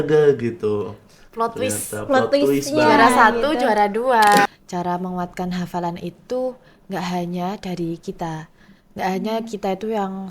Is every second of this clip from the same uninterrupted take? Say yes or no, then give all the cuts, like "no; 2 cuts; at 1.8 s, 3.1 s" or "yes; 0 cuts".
no; 1 cut; at 4.5 s